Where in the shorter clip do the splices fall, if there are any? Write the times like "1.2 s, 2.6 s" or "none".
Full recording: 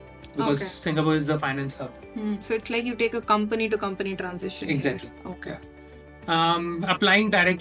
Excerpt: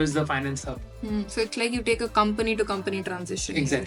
none

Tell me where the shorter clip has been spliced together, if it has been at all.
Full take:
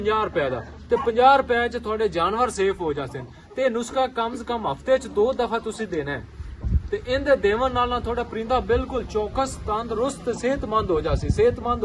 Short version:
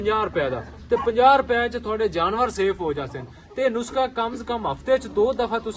none

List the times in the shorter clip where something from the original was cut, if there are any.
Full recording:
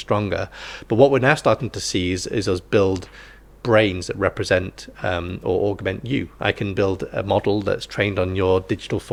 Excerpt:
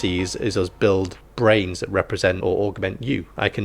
1.2 s, 2.4 s

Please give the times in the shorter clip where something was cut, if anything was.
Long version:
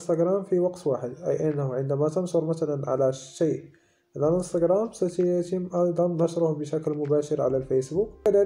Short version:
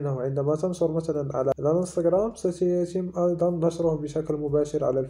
1.5 s

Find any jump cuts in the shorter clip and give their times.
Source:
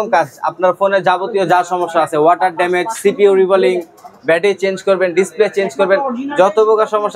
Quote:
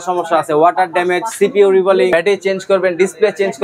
2.1 s

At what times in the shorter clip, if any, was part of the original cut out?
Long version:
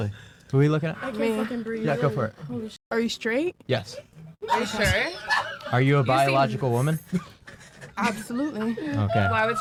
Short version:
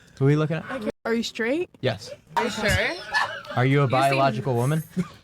0.9 s, 2.3 s

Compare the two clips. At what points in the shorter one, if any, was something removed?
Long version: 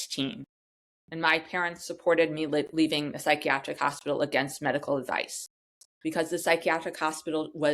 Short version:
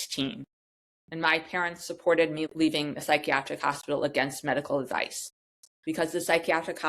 2.5 s

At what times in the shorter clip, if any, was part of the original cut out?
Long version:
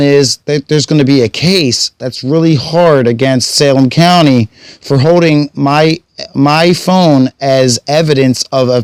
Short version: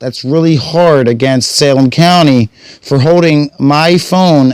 3.5 s

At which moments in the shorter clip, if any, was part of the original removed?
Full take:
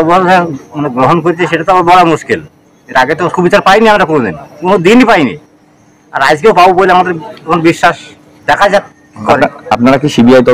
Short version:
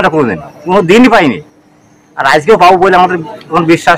none

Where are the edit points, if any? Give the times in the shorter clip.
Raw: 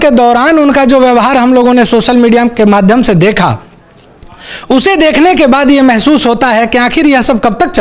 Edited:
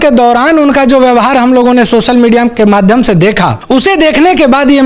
3.6 s

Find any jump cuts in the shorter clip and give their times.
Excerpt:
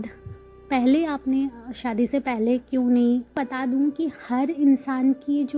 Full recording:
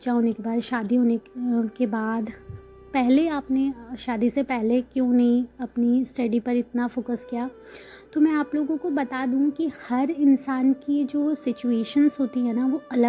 3.3 s

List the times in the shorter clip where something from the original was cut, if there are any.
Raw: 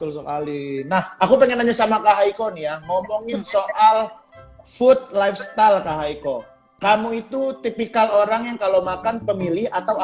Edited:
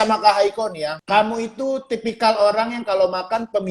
0.9 s

